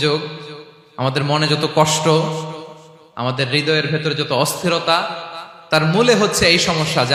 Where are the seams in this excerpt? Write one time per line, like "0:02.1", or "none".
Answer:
none